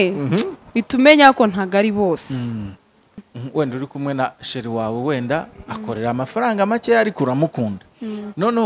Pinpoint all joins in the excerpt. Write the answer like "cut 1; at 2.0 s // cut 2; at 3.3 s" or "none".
cut 1; at 3.2 s